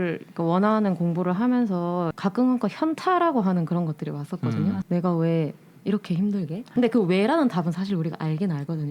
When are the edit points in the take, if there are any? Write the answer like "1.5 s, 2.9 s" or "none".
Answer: 2.1 s, 4.8 s, 6.7 s